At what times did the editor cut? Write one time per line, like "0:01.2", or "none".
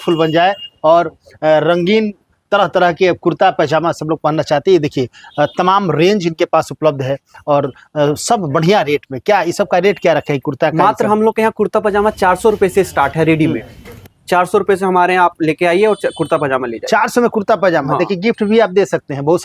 none